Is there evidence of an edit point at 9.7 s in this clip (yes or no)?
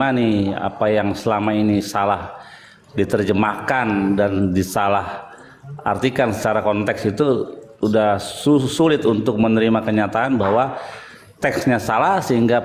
no